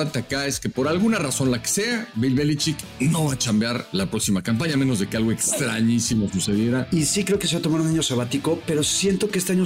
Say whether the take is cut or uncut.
cut